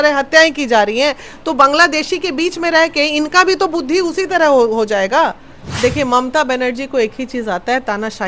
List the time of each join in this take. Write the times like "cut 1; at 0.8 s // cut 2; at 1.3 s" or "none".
cut 1; at 5.6 s